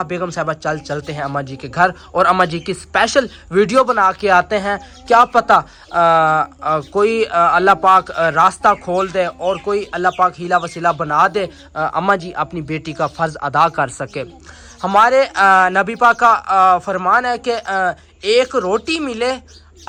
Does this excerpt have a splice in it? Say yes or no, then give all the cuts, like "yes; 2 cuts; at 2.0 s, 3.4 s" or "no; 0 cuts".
no; 0 cuts